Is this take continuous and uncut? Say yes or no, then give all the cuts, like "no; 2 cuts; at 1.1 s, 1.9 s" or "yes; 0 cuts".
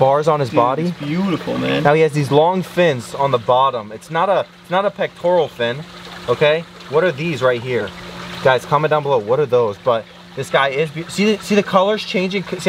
yes; 0 cuts